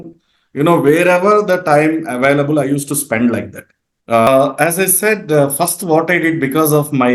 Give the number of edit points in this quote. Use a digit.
1